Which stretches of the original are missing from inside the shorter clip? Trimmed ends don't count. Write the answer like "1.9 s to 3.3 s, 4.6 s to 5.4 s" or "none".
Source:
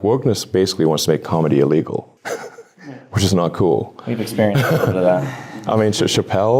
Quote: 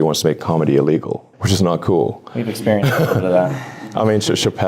2.1 s to 3.0 s